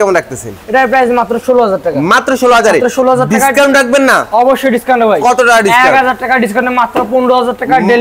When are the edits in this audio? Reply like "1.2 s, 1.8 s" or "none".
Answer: none